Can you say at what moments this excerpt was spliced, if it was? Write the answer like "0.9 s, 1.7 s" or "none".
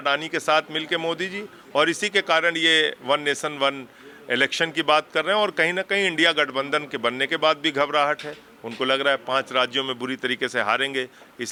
none